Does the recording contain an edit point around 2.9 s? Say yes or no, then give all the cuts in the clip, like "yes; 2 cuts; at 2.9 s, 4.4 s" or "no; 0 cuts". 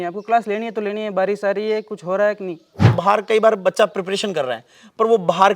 yes; 1 cut; at 2.9 s